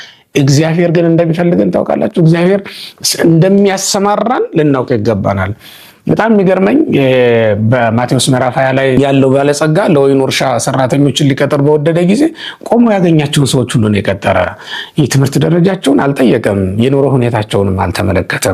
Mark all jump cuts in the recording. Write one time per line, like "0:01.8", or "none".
none